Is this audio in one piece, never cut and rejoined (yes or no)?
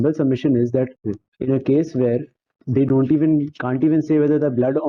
yes